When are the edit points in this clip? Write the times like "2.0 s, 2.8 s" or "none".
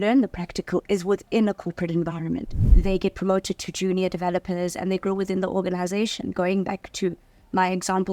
2.6 s